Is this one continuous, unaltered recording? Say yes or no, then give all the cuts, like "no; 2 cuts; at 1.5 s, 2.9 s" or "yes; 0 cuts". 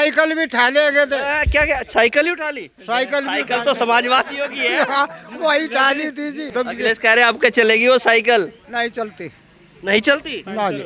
yes; 0 cuts